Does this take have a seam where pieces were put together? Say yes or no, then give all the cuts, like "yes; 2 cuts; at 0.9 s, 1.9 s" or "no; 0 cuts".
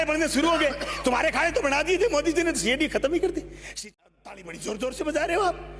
yes; 1 cut; at 3.8 s